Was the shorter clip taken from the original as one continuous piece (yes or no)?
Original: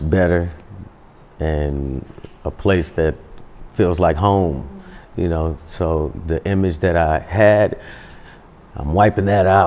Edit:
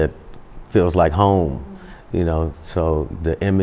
yes